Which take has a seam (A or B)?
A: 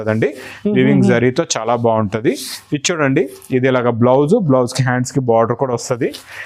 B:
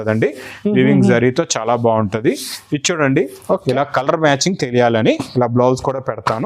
B